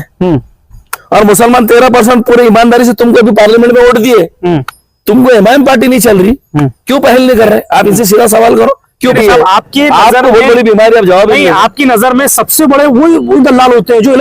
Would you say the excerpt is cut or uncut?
cut